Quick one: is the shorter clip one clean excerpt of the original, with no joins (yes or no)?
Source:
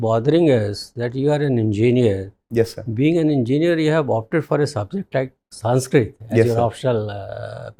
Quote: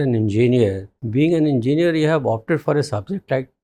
no